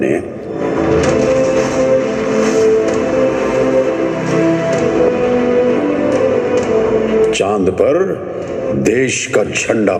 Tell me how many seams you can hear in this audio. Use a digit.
0